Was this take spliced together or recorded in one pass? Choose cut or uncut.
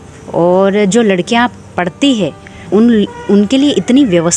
cut